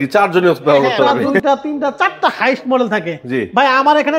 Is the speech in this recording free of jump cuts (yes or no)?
no